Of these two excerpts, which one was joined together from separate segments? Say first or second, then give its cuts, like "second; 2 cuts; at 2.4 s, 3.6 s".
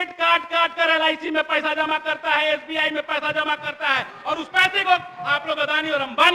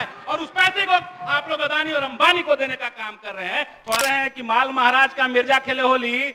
second; 1 cut; at 4.0 s